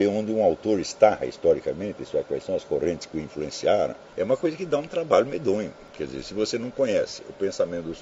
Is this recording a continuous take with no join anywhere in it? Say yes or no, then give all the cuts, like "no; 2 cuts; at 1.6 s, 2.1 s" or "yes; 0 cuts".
no; 2 cuts; at 4.0 s, 5.8 s